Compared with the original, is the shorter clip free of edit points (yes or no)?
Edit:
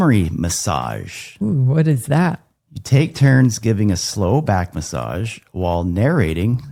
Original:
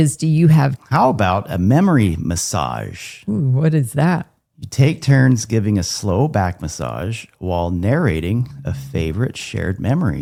yes